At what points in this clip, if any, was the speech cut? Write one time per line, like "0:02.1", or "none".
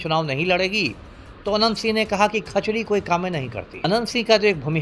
0:03.7